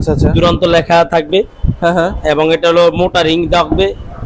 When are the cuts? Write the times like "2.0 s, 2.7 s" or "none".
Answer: none